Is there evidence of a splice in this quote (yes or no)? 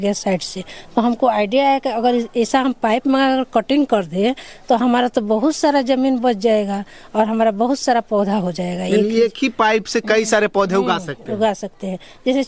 no